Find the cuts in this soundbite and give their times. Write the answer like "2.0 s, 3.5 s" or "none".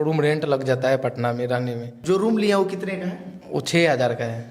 1.9 s